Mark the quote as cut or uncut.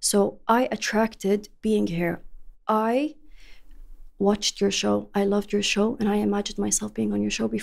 uncut